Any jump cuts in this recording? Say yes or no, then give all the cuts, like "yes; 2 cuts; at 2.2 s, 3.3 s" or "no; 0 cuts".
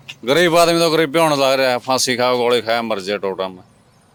no; 0 cuts